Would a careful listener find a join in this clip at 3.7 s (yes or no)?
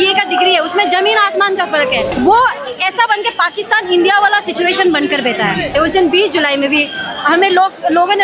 no